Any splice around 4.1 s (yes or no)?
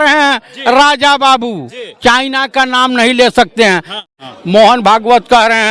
yes